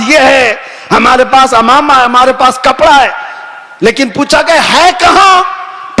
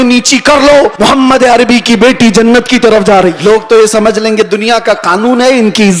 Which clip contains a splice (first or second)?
second